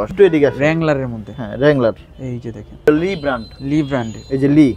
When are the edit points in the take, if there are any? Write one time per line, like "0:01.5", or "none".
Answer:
0:02.9